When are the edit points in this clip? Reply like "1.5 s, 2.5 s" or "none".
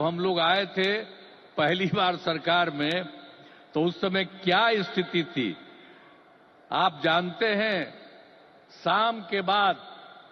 none